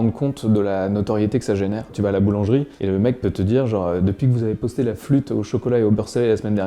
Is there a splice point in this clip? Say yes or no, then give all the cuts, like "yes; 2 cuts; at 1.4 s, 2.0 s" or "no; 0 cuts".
yes; 1 cut; at 1.9 s